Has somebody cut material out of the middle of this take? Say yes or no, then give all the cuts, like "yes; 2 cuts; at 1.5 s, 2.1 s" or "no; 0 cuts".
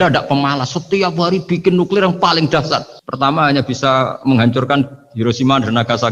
no; 0 cuts